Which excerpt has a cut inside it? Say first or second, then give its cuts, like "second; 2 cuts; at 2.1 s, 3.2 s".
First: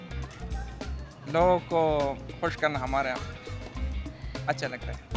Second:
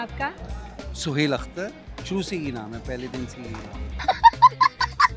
second; 1 cut; at 4.0 s